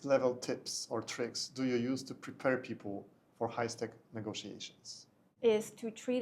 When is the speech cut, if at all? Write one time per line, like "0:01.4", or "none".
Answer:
0:05.3